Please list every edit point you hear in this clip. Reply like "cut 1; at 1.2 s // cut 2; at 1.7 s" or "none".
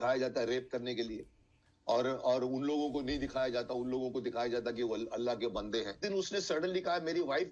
cut 1; at 6.0 s